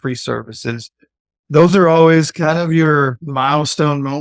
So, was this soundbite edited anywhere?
yes; 1 cut; at 3.2 s

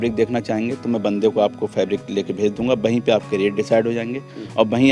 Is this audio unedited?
yes; 0 cuts

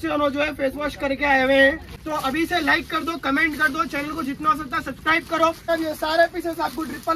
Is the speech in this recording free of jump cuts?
no; 2 cuts; at 1.9 s, 5.7 s

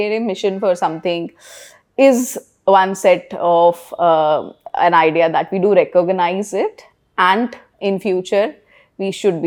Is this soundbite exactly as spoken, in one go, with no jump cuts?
yes; 0 cuts

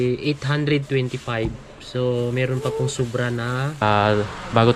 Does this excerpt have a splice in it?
yes; 1 cut; at 3.8 s

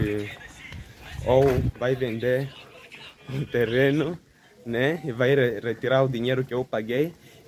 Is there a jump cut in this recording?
no; 0 cuts

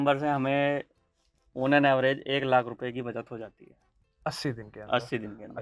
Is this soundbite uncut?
yes; 0 cuts

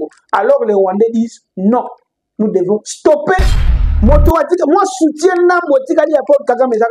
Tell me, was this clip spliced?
yes; 1 cut; at 3.8 s

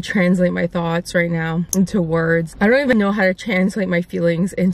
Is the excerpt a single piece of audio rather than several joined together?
no; 2 cuts; at 1.7 s, 2.9 s

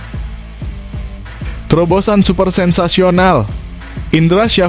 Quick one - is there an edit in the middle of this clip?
yes; 1 cut; at 1.7 s

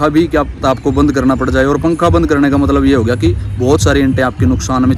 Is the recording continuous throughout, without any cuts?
yes; 0 cuts

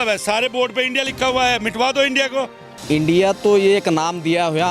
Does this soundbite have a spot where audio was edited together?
yes; 1 cut; at 2.7 s

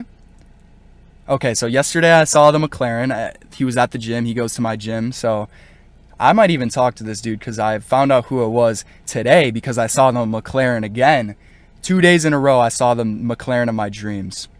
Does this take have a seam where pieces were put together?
no; 0 cuts

